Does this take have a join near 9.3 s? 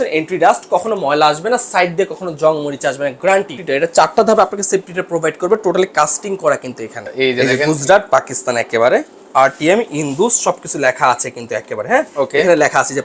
no; 2 cuts; at 3.6 s, 7.0 s

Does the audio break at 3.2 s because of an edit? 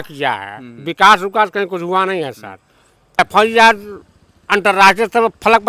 yes; 1 cut; at 3.2 s

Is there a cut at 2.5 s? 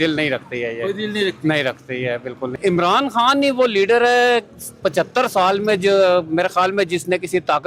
yes; 1 cut; at 2.5 s

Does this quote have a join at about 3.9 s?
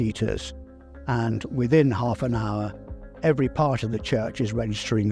no; 0 cuts

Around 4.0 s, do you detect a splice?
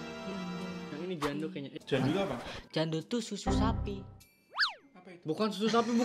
no; 0 cuts

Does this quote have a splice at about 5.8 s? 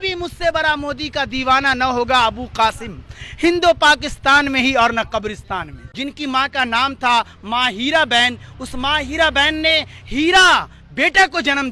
yes; 1 cut; at 5.8 s

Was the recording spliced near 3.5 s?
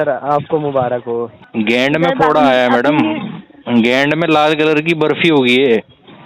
no; 1 cut; at 1.4 s

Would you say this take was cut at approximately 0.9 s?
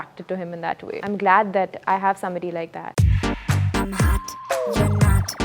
yes; 2 cuts; at 0.9 s, 2.8 s

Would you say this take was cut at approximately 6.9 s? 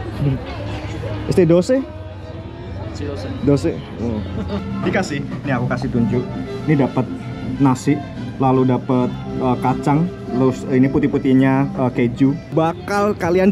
no; 2 cuts; at 4.6 s, 12.5 s

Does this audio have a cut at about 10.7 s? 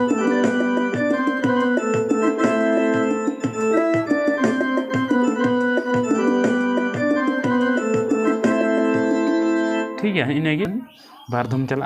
yes; 1 cut; at 10.7 s

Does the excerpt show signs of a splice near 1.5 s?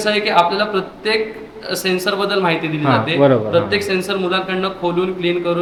no; 0 cuts

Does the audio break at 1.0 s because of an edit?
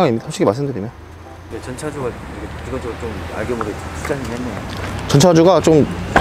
no; 0 cuts

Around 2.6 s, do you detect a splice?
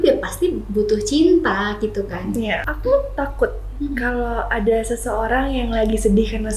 yes; 1 cut; at 2.6 s

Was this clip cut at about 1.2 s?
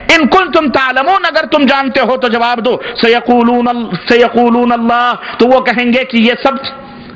no; 0 cuts

